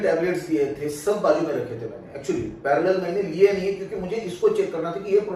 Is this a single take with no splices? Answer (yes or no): yes